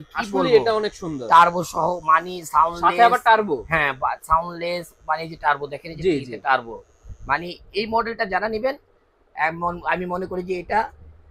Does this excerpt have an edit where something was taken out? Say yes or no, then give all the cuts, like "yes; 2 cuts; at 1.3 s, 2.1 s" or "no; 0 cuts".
no; 0 cuts